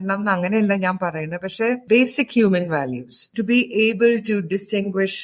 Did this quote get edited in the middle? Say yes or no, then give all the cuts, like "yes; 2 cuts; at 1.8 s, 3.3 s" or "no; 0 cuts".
yes; 2 cuts; at 1.8 s, 3.3 s